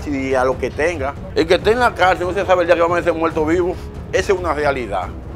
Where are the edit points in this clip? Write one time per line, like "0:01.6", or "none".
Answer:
0:01.2